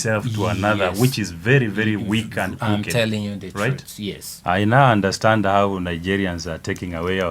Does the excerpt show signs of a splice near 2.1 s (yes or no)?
no